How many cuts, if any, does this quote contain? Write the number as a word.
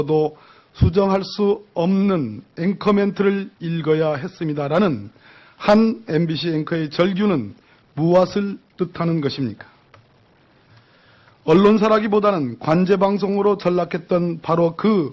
zero